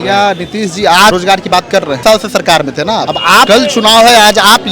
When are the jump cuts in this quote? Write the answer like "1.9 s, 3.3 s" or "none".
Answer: 1.6 s, 3.3 s

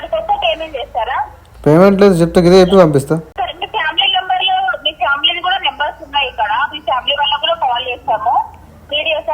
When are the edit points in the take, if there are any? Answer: 3.3 s

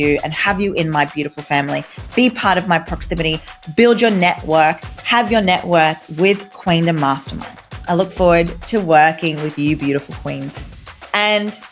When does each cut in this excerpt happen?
none

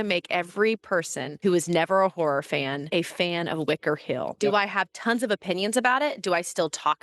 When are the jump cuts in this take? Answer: 1.2 s, 2.8 s, 4.3 s

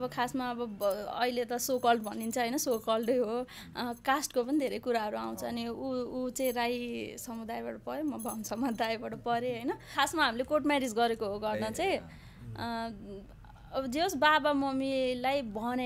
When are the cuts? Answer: 9.9 s

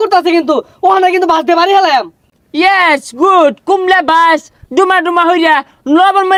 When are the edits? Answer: none

